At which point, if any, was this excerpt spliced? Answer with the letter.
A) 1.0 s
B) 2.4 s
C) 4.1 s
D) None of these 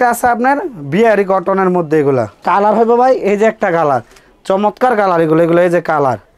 B